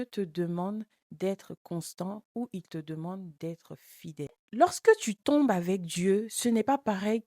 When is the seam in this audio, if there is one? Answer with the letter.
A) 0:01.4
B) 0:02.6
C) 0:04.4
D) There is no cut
C